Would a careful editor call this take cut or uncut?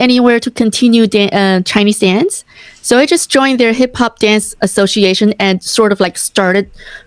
uncut